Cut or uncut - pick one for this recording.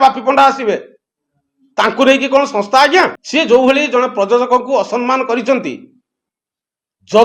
cut